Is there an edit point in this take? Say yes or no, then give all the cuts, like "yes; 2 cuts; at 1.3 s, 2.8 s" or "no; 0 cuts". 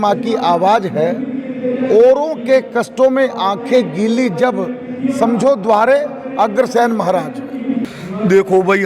yes; 1 cut; at 7.9 s